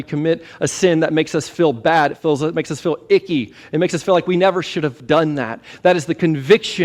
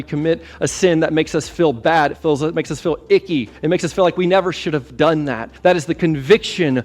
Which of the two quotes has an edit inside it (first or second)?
second